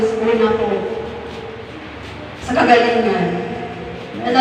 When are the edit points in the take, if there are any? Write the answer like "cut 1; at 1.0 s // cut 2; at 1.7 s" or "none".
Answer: none